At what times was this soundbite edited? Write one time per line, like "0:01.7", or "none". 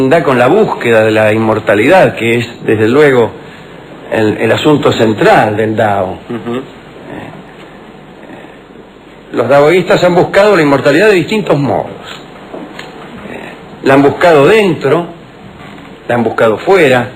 none